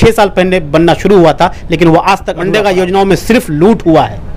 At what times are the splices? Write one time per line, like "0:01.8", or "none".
0:02.3